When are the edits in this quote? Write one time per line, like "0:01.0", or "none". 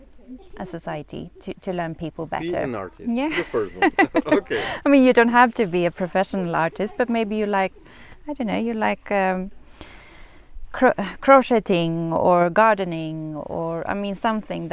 none